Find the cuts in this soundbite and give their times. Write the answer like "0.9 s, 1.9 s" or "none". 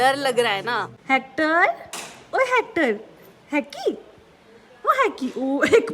0.9 s